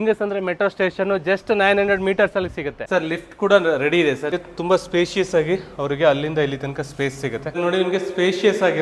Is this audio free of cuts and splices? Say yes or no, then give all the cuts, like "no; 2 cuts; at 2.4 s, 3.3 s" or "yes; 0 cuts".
no; 3 cuts; at 2.8 s, 4.3 s, 7.5 s